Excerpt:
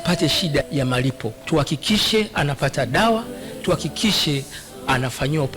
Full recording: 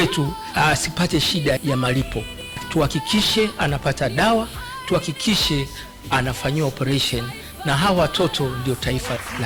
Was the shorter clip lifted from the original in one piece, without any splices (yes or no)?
no